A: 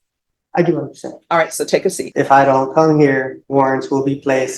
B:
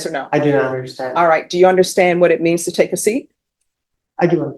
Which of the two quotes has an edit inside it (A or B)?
A